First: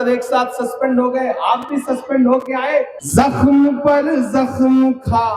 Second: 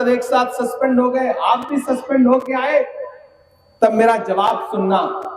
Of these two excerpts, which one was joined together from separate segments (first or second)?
first